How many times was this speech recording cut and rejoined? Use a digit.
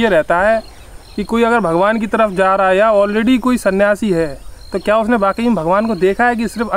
0